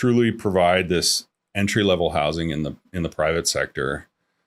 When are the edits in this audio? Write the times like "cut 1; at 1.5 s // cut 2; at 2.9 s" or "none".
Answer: none